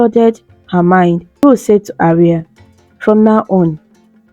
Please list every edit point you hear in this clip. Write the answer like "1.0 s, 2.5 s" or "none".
1.4 s

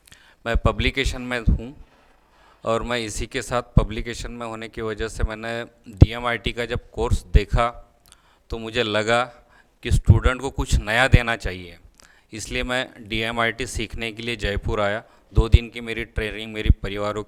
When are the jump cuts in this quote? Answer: none

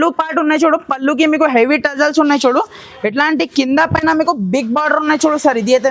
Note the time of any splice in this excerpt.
none

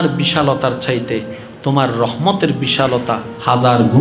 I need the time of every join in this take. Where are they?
none

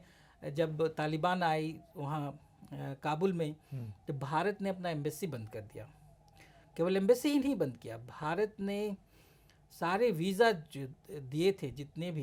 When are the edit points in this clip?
none

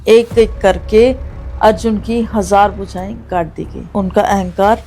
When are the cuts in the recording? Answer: 3.8 s

